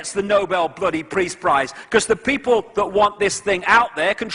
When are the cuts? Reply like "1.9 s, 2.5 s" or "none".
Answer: none